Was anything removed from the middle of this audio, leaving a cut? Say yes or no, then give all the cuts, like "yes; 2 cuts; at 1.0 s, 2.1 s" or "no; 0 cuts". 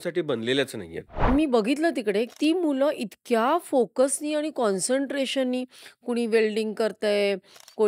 yes; 2 cuts; at 1.3 s, 2.3 s